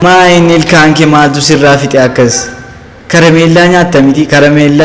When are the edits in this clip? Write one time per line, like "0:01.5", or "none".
none